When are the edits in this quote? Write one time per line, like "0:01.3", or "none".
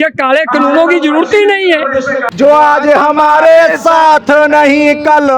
0:02.2